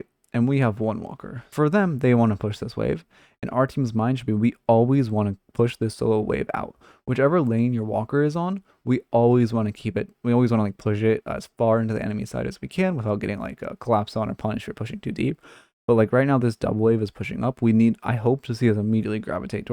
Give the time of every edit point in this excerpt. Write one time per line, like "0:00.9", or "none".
0:01.5
0:05.4